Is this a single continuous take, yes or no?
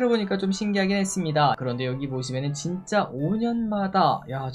no